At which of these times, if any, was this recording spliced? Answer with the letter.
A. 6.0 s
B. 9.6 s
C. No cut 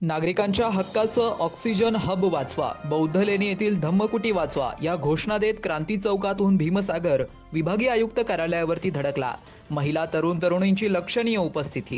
C